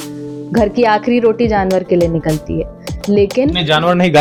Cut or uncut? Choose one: uncut